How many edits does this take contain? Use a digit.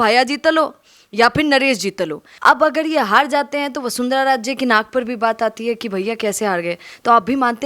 1